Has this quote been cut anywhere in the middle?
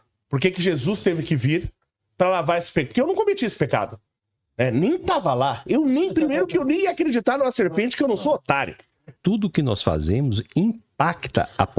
yes; 1 cut; at 9.1 s

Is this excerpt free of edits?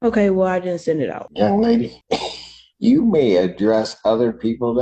no; 2 cuts; at 1.2 s, 2.0 s

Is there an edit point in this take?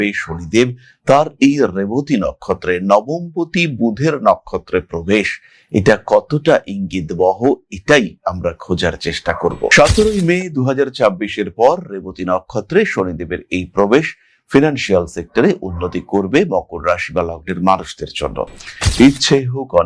yes; 1 cut; at 18.8 s

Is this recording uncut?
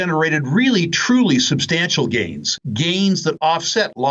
yes; 0 cuts

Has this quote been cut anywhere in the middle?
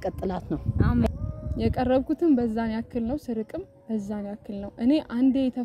yes; 1 cut; at 1.1 s

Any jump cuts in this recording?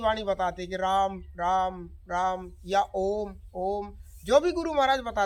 no; 0 cuts

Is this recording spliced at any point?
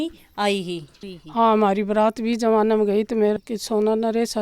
yes; 2 cuts; at 0.9 s, 3.4 s

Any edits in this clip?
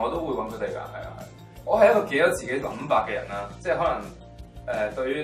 no; 0 cuts

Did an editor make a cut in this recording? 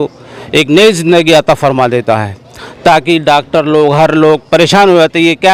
no; 0 cuts

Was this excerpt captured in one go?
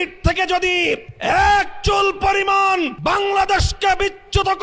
no; 2 cuts; at 1.1 s, 3.0 s

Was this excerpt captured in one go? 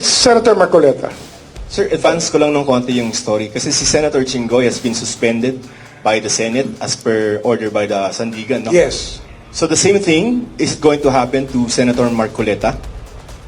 no; 1 cut; at 1.1 s

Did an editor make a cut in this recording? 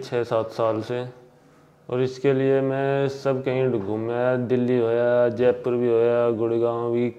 no; 0 cuts

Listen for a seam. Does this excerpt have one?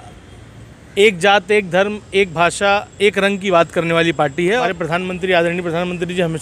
yes; 1 cut; at 4.6 s

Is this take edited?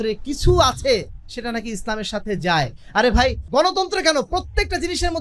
yes; 1 cut; at 3.4 s

